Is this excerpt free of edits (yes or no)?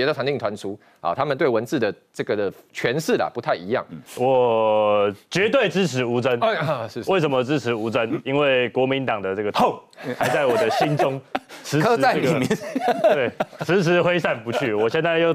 no